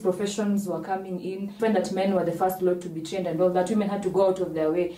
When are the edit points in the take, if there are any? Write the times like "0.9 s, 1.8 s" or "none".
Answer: 1.5 s